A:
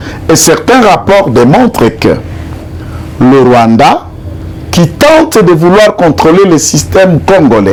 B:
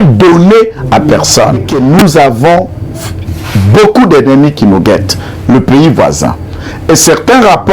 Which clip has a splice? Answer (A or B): B